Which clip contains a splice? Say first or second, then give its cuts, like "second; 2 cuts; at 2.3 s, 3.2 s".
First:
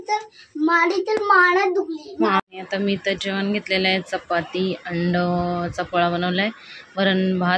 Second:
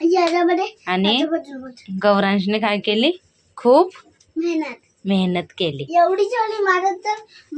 first; 1 cut; at 2.4 s